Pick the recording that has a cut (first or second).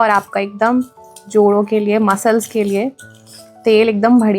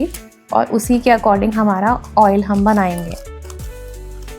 second